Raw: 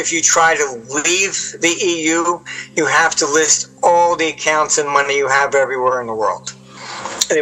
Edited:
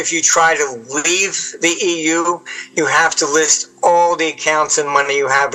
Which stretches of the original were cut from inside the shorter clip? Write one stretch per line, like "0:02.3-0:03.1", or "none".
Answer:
none

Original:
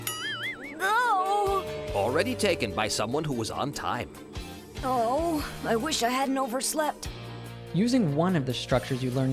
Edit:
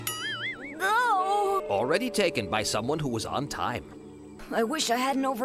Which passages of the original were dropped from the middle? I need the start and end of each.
0:01.6-0:01.9
0:04.7-0:05.5

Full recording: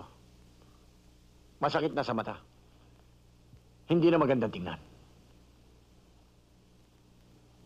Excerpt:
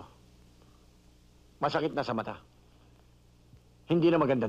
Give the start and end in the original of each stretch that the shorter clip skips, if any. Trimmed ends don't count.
none

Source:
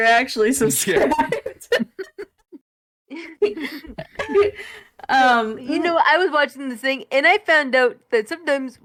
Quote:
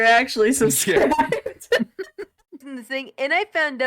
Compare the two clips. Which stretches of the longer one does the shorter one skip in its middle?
0:02.7-0:06.7

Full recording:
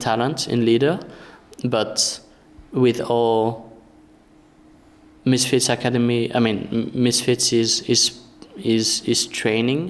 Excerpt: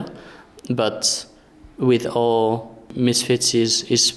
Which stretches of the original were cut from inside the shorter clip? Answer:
0:03.9-0:06.9

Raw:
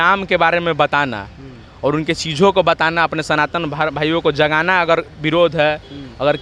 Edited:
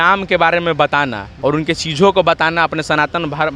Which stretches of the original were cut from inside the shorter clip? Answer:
0:01.2-0:01.6

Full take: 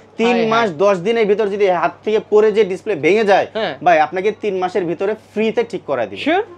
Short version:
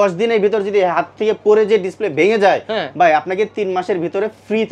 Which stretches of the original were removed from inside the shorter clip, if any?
none

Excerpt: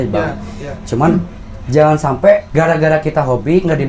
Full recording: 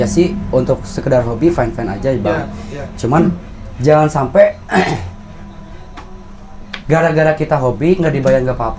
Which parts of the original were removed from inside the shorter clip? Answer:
0:04.6-0:06.8

